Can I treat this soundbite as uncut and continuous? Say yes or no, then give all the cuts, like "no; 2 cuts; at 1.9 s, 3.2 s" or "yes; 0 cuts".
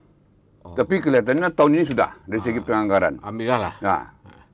yes; 0 cuts